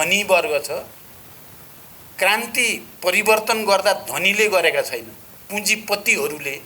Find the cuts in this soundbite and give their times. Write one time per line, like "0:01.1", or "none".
none